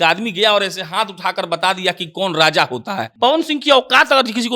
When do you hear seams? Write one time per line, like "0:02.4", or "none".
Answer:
0:03.1